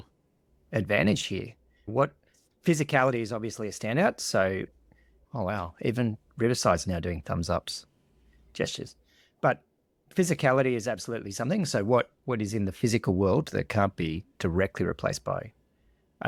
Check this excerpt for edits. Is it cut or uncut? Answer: uncut